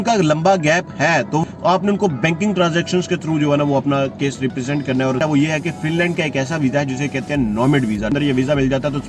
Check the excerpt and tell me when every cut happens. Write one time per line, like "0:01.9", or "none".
0:01.4
0:05.2
0:08.1

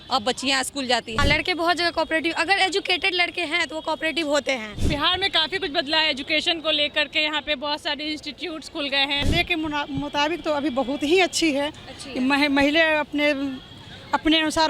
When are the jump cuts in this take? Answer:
0:01.2
0:04.7
0:09.2

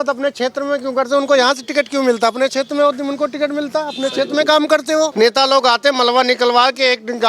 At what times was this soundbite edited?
0:05.1

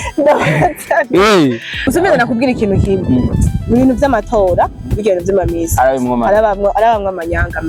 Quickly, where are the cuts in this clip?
0:01.8

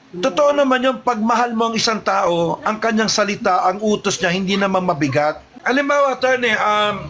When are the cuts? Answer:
0:05.5

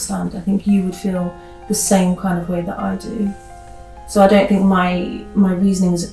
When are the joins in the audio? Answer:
none

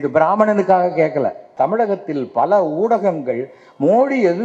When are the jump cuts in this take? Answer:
0:01.5

